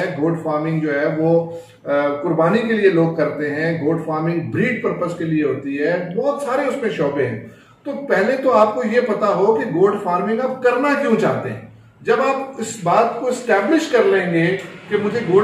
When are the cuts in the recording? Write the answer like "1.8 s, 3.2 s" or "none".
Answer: none